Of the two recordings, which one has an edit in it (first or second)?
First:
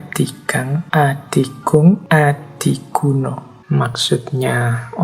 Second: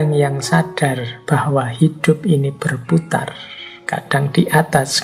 first